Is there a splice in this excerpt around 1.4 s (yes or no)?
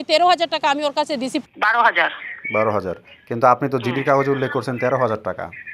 yes